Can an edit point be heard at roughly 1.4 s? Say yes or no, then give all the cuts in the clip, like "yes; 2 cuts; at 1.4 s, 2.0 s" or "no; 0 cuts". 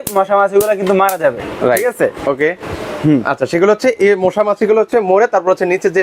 no; 0 cuts